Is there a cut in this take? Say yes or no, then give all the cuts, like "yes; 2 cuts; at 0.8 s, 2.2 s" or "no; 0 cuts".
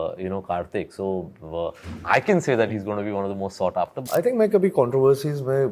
yes; 1 cut; at 4.0 s